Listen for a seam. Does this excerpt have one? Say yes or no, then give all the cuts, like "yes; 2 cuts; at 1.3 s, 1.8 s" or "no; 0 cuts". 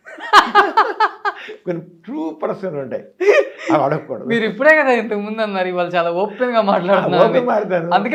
no; 0 cuts